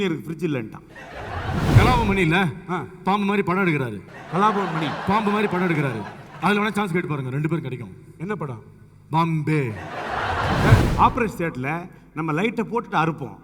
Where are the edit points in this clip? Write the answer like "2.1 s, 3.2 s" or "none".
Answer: 1.8 s, 10.8 s